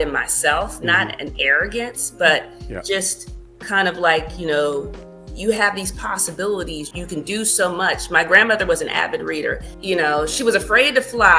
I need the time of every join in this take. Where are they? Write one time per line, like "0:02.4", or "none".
0:06.9
0:09.7